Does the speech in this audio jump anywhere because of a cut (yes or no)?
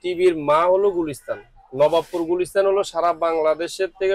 no